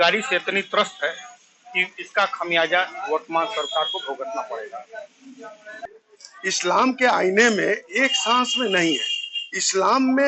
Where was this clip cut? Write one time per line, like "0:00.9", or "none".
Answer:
0:05.8